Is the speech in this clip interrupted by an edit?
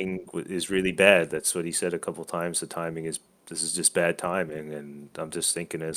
no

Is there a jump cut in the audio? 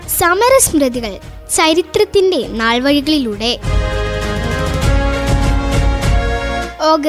no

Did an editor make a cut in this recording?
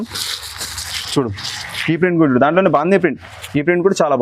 no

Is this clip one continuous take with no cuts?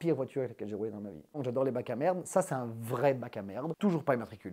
no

